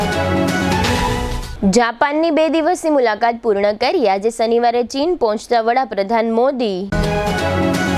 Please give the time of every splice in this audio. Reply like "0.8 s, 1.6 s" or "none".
0.9 s